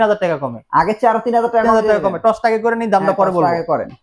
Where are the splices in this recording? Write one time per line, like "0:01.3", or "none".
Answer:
none